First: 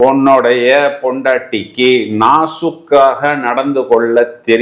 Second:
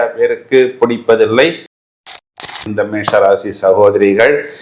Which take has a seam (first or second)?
second